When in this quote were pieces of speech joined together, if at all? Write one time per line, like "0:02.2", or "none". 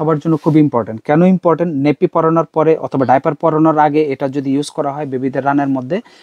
none